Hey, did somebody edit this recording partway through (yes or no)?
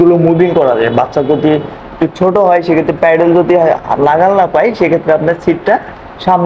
no